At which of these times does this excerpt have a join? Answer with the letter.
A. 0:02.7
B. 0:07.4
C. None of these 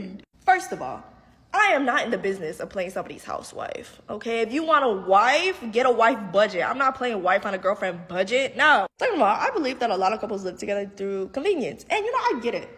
B